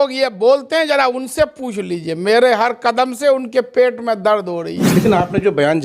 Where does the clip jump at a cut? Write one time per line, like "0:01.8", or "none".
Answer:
0:04.9